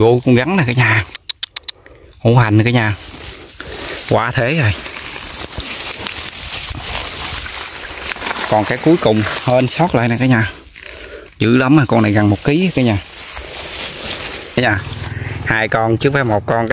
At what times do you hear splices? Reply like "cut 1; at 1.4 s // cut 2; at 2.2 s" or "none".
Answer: cut 1; at 14.6 s